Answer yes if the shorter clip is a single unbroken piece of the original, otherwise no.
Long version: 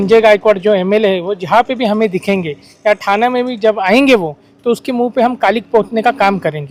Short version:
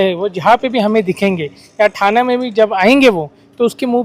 yes